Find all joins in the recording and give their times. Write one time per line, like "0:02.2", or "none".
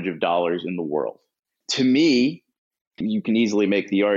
0:01.5
0:02.9